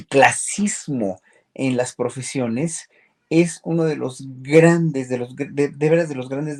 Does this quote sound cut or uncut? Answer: uncut